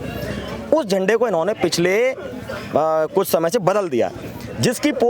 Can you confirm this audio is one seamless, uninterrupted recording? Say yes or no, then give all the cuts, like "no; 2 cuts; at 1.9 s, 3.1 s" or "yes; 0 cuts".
yes; 0 cuts